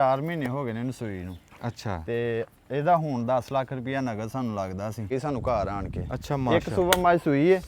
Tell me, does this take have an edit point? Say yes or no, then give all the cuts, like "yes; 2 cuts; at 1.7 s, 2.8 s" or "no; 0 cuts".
yes; 1 cut; at 5.1 s